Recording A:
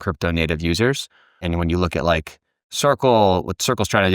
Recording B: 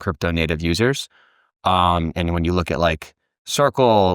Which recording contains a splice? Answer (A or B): A